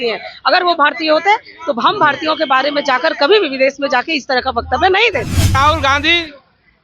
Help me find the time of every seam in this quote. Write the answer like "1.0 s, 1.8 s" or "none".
5.5 s

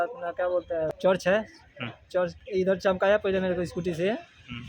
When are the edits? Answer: 0.9 s

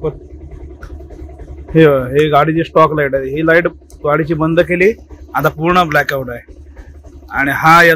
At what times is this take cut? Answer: none

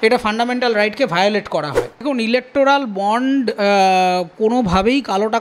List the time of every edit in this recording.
2.1 s

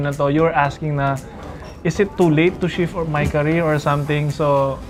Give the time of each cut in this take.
none

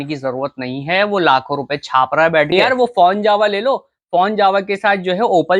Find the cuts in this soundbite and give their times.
2.5 s

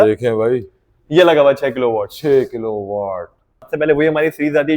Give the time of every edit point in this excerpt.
3.6 s

